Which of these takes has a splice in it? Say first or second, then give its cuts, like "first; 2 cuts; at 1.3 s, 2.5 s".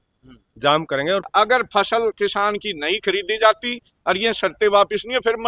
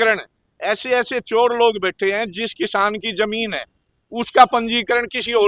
first; 1 cut; at 1.2 s